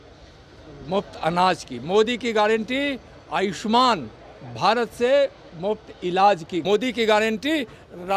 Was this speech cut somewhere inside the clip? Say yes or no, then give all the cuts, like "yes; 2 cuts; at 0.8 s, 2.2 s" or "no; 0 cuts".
yes; 1 cut; at 6.6 s